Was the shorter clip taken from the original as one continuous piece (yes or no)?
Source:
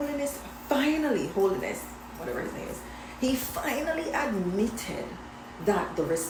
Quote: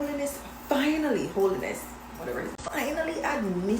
no